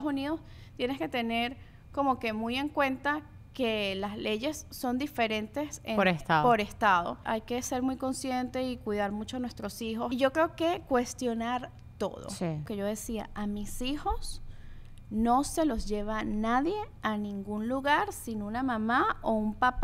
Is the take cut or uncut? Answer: cut